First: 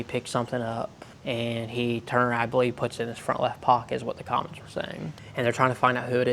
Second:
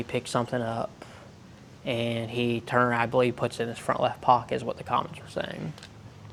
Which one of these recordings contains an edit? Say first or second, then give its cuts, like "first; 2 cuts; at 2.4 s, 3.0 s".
first; 2 cuts; at 1.1 s, 5.2 s